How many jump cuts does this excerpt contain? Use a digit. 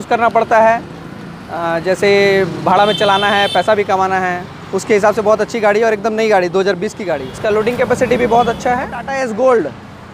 2